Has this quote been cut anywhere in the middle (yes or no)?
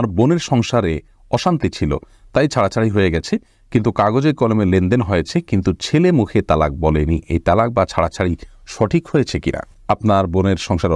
no